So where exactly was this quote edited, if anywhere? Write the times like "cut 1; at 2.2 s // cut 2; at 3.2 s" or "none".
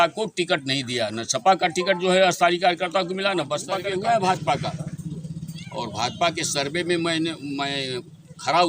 cut 1; at 3.8 s